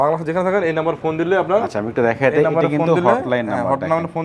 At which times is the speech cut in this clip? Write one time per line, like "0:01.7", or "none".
none